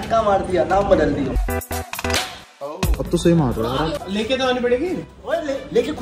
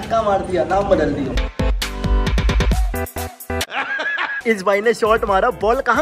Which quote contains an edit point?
first; 2 cuts; at 1.4 s, 4.0 s

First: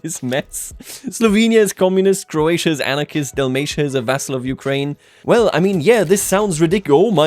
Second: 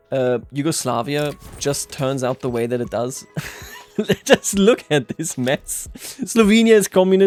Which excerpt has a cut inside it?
first; 1 cut; at 5.1 s

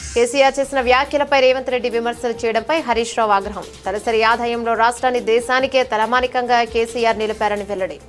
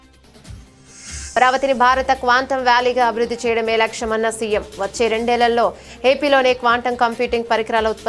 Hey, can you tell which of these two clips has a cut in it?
second; 1 cut; at 1.3 s

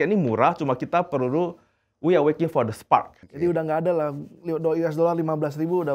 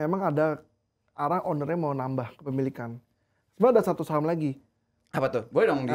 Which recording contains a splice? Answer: first; 1 cut; at 3.2 s

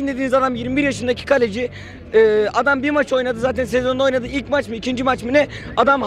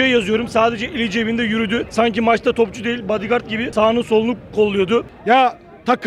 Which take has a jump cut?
second; 3 cuts; at 1.9 s, 3.7 s, 5.1 s

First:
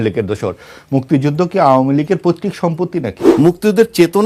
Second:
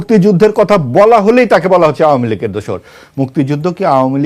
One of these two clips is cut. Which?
first; 1 cut; at 3.2 s

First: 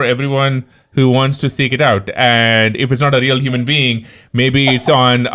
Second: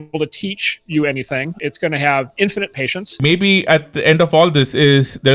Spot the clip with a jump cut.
second; 2 cuts; at 1.5 s, 3.2 s

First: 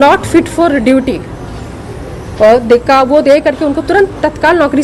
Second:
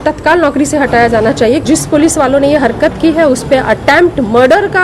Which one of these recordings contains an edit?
second; 1 cut; at 1.6 s

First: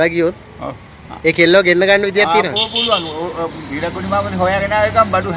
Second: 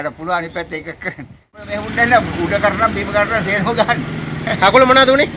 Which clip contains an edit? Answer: second; 1 cut; at 1.6 s

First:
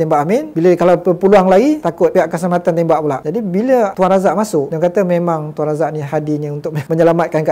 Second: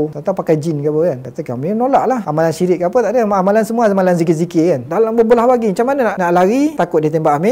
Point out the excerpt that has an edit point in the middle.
second; 3 cuts; at 2.3 s, 4.9 s, 6.1 s

